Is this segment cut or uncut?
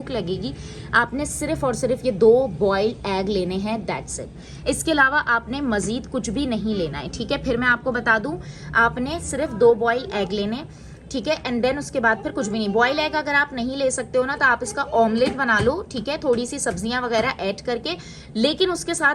uncut